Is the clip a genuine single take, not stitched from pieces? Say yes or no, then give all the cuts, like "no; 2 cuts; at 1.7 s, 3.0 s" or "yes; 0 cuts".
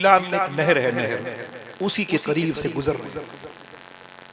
yes; 0 cuts